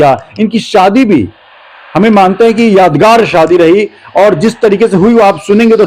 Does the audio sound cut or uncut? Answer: uncut